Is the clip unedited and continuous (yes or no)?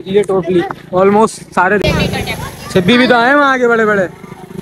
no